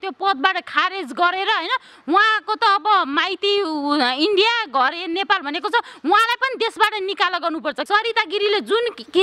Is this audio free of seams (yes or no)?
no